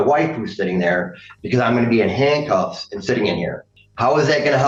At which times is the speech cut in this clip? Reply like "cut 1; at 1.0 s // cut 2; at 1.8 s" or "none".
none